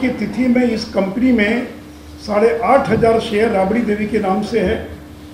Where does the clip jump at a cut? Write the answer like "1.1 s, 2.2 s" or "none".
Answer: none